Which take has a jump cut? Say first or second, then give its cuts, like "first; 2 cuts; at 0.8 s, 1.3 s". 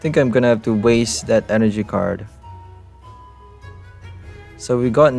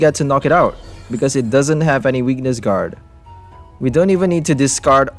second; 1 cut; at 3.4 s